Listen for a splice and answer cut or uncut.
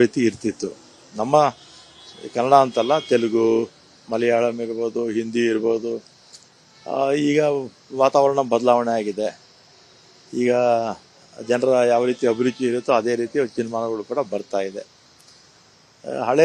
uncut